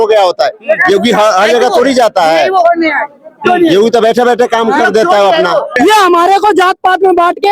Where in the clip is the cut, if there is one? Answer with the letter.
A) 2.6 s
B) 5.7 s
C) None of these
B